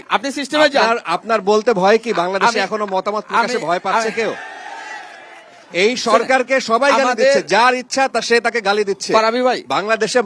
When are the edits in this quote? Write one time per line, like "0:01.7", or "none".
none